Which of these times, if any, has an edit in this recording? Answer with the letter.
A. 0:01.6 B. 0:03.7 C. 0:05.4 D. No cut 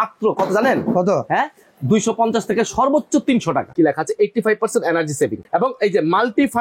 B